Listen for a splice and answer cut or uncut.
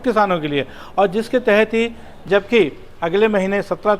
cut